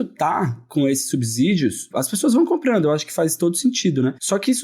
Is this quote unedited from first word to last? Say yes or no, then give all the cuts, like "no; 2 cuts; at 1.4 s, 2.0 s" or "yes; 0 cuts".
no; 1 cut; at 1.9 s